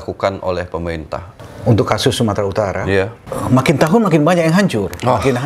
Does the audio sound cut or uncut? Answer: cut